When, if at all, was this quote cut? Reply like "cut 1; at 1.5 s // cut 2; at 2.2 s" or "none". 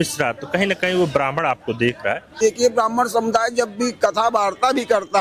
cut 1; at 2.3 s